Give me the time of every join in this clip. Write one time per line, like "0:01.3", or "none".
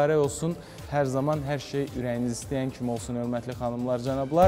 none